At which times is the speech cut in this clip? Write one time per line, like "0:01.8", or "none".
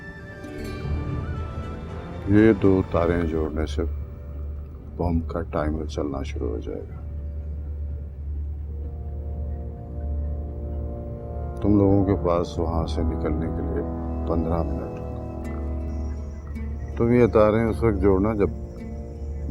none